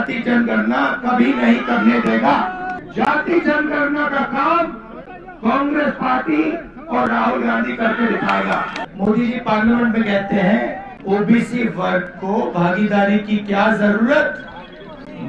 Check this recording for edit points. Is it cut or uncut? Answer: cut